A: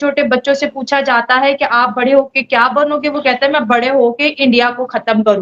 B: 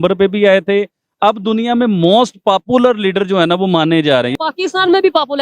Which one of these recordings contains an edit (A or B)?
B